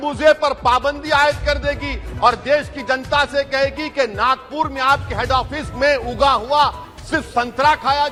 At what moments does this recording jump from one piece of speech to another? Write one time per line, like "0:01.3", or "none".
none